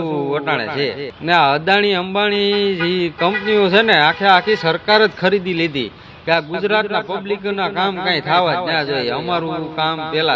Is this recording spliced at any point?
yes; 1 cut; at 1.1 s

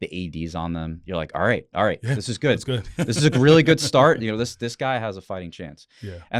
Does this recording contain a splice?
no; 0 cuts

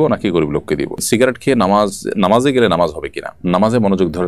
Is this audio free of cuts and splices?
no; 2 cuts; at 1.0 s, 3.4 s

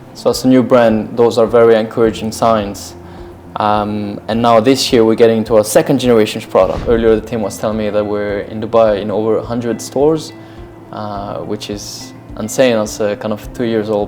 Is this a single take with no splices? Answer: no; 1 cut; at 6.8 s

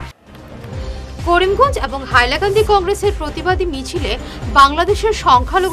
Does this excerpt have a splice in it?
no; 0 cuts

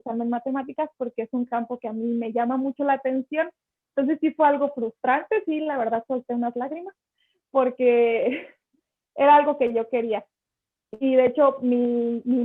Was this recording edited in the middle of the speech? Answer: no; 0 cuts

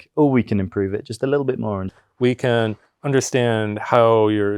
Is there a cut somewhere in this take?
yes; 1 cut; at 1.9 s

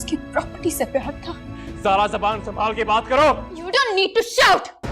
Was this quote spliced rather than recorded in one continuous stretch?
yes; 1 cut; at 3.5 s

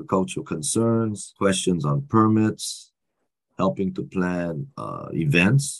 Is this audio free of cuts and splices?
no; 1 cut; at 1.3 s

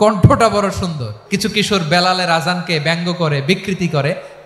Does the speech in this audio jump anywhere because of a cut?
yes; 1 cut; at 1.1 s

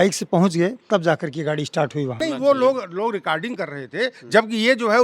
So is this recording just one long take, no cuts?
no; 1 cut; at 2.2 s

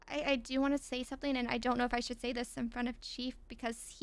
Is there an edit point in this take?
no; 0 cuts

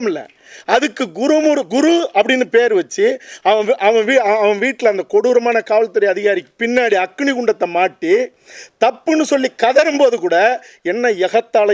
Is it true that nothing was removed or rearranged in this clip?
yes; 0 cuts

